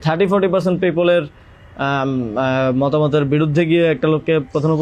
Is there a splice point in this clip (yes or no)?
no